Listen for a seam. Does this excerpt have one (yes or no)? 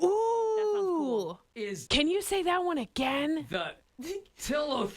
yes